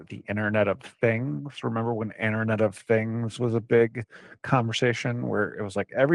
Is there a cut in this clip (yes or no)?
no